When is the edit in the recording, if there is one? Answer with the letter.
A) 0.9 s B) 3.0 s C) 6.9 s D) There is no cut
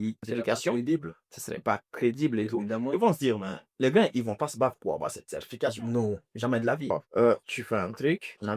C